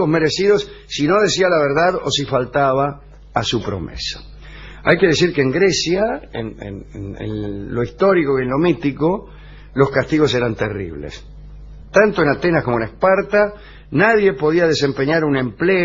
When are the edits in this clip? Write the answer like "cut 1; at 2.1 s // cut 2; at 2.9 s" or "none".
cut 1; at 7.8 s